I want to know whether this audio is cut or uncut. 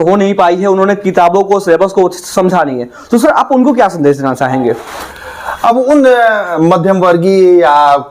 uncut